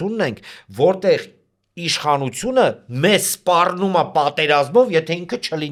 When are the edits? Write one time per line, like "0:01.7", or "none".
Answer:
none